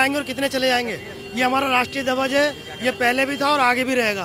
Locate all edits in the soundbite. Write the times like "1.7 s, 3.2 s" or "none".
none